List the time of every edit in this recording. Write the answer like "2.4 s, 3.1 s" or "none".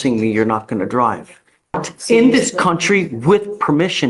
1.9 s